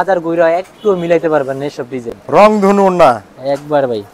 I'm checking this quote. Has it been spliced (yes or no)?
no